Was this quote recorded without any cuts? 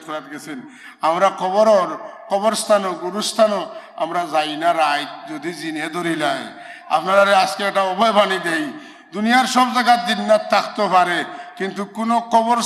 yes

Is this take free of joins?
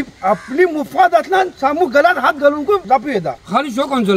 no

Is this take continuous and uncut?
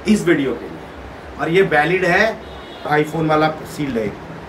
no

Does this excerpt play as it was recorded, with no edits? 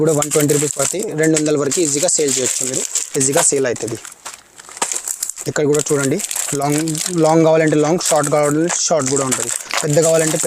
yes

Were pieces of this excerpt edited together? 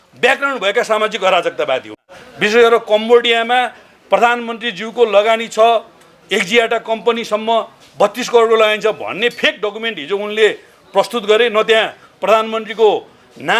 yes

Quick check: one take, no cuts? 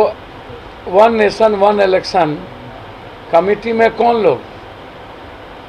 yes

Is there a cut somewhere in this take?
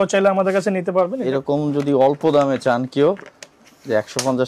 yes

